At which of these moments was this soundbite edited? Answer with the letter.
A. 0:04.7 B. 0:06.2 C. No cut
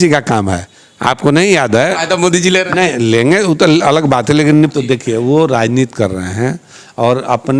A